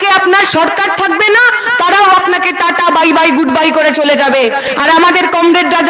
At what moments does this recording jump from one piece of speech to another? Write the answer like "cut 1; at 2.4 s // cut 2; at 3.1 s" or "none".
none